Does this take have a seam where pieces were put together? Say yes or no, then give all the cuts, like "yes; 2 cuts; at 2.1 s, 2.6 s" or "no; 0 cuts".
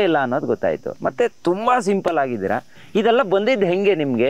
no; 0 cuts